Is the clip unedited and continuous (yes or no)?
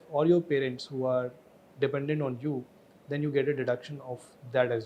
yes